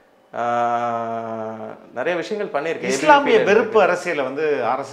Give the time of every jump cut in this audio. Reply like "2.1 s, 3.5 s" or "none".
none